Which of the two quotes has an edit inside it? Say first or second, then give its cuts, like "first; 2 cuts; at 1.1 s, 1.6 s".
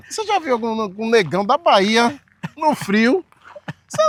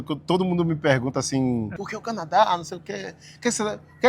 second; 1 cut; at 1.8 s